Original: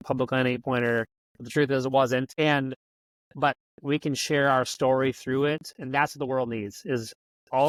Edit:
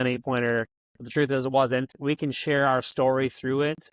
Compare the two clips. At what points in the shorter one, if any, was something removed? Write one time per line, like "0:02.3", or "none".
0:01.9

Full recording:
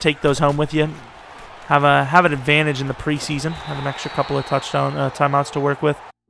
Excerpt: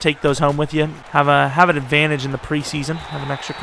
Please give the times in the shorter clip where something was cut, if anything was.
0:01.0

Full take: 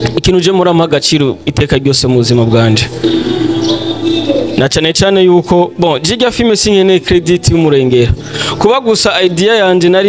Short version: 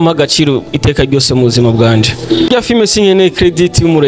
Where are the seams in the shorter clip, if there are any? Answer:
0:02.5

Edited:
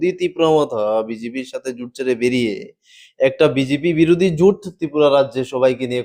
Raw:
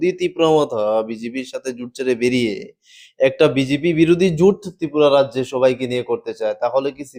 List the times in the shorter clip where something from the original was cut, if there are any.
none

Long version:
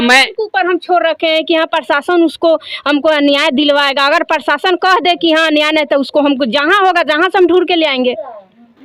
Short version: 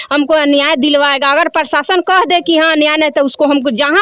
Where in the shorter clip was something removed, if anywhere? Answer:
none

